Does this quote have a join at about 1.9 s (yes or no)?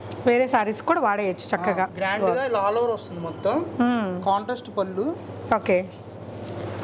yes